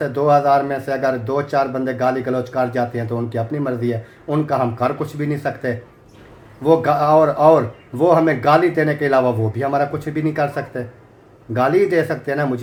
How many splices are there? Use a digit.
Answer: 0